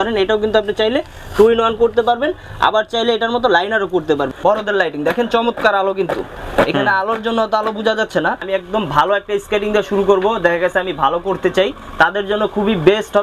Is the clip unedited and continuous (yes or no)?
no